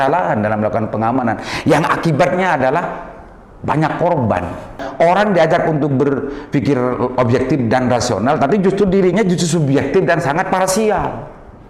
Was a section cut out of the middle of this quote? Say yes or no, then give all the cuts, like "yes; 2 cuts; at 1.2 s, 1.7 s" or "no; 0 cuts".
yes; 1 cut; at 4.8 s